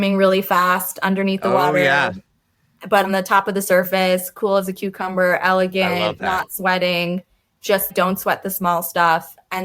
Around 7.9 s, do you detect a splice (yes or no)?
yes